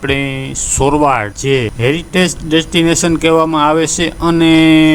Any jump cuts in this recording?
no; 0 cuts

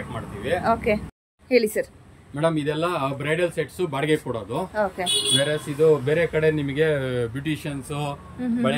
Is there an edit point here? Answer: yes; 1 cut; at 1.1 s

